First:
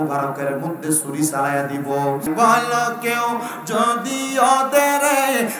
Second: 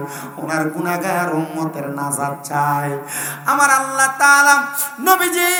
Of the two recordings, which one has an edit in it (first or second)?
first